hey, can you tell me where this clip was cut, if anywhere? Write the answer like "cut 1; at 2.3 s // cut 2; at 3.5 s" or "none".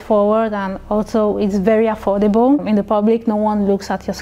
cut 1; at 2.6 s

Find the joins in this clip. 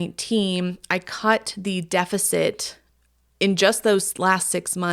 none

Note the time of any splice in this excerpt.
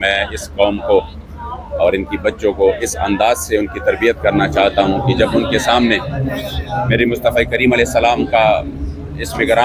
none

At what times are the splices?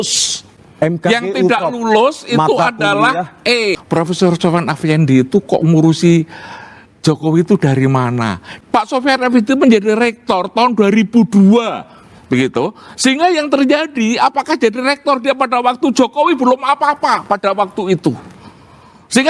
cut 1; at 3.8 s // cut 2; at 8.4 s

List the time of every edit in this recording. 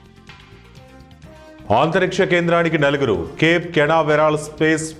cut 1; at 1.7 s

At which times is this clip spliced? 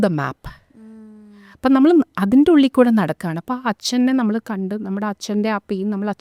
none

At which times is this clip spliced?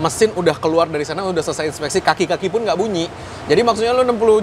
none

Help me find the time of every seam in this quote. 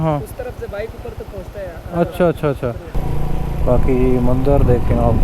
cut 1; at 2.9 s

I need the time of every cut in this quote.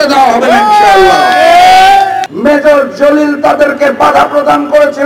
cut 1; at 2.3 s

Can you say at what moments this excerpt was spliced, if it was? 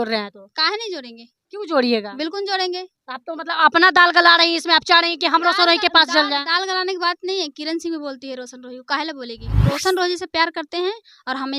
cut 1; at 9.6 s

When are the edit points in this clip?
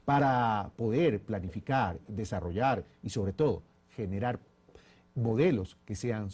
none

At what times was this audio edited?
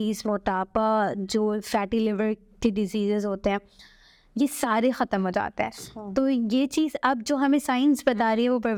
none

